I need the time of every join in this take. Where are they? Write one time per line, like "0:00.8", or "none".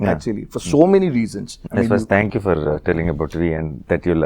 0:01.5